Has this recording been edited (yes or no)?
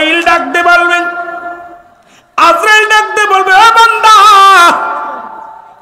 no